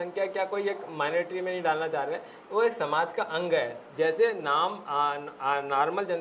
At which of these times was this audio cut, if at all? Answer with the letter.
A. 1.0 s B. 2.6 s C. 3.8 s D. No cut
D